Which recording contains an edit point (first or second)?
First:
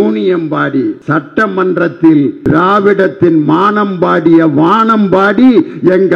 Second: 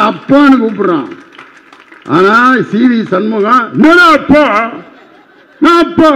first